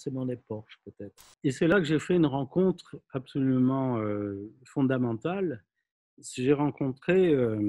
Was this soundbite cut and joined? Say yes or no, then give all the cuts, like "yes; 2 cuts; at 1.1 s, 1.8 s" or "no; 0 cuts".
yes; 1 cut; at 1.7 s